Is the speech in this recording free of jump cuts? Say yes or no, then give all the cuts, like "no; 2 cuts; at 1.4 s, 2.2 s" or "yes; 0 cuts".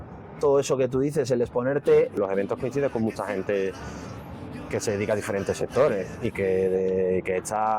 no; 1 cut; at 2.1 s